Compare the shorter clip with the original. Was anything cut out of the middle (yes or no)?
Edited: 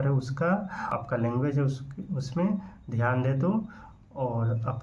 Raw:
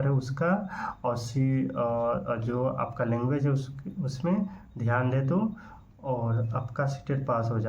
yes